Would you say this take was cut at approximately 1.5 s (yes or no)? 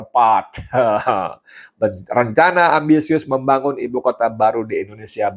no